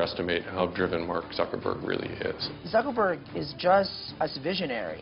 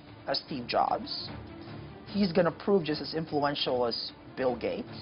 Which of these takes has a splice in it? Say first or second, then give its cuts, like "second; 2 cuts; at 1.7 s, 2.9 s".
first; 2 cuts; at 2.5 s, 4.0 s